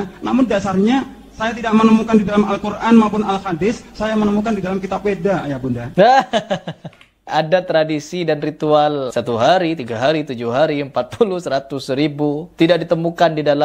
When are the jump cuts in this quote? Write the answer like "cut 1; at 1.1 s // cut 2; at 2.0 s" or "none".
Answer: cut 1; at 5.8 s // cut 2; at 7.3 s // cut 3; at 9.1 s // cut 4; at 12.5 s